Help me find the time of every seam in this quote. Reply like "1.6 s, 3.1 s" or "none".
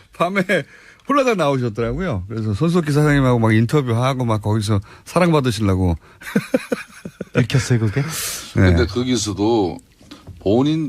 3.0 s